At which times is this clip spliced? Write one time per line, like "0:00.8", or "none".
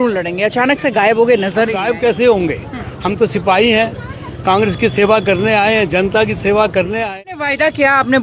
0:02.0
0:07.2